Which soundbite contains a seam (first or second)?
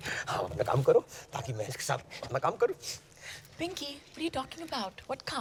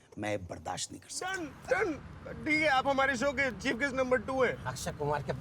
second